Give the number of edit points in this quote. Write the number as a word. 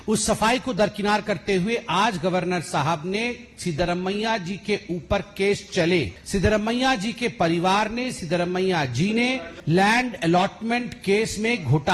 two